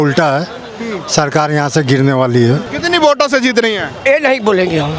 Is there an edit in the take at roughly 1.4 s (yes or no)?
no